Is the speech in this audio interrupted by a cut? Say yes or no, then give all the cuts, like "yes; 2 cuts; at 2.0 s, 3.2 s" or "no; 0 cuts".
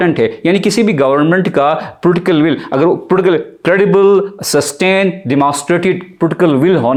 no; 0 cuts